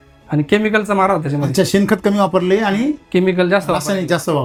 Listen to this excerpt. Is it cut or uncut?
uncut